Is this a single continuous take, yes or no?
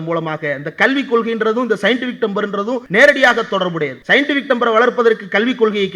no